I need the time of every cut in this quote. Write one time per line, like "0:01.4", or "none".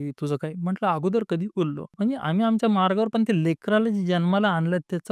0:01.8